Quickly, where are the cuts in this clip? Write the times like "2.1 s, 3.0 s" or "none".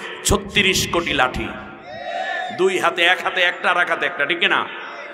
none